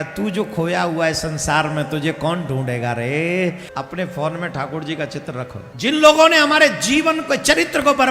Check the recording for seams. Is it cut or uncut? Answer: cut